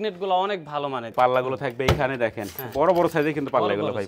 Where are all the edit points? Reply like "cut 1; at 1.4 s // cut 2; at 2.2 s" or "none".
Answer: cut 1; at 1.1 s

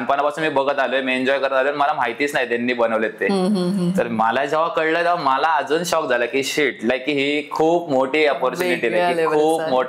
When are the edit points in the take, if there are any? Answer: none

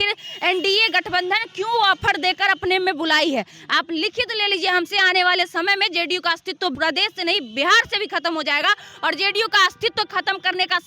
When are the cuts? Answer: cut 1; at 6.7 s

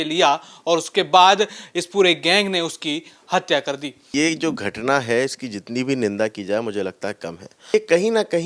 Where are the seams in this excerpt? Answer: cut 1; at 4.1 s // cut 2; at 7.7 s

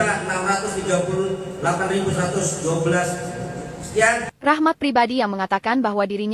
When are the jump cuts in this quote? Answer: cut 1; at 4.3 s

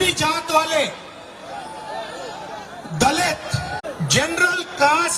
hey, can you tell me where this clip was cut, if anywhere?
cut 1; at 3.8 s

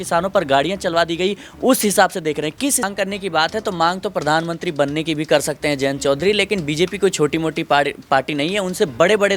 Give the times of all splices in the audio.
cut 1; at 2.8 s

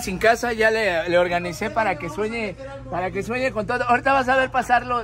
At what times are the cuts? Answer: none

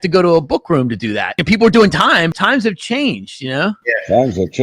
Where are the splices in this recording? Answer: cut 1; at 1.4 s // cut 2; at 2.3 s

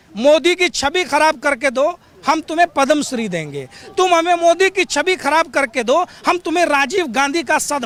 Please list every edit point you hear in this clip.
none

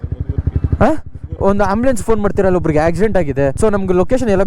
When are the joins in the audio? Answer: cut 1; at 3.5 s

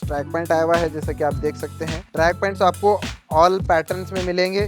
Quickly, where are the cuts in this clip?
cut 1; at 2.0 s

